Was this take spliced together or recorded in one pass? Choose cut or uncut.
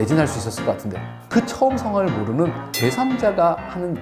cut